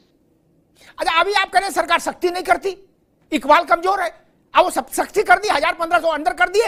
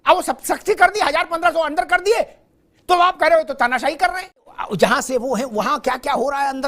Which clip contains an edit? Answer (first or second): second